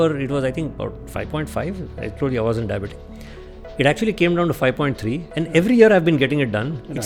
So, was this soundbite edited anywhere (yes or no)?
no